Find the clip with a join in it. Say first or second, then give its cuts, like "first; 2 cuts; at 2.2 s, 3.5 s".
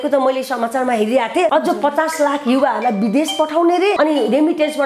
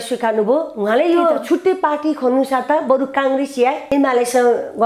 first; 2 cuts; at 1.5 s, 4.0 s